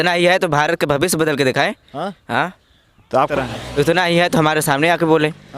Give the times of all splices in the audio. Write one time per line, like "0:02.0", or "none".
0:03.3